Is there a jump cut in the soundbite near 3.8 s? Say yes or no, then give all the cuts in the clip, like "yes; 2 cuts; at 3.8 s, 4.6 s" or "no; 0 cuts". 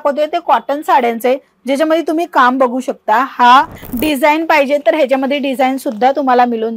yes; 1 cut; at 3.8 s